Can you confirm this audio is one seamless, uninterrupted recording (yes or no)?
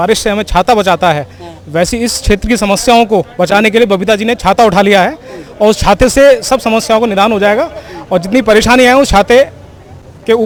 yes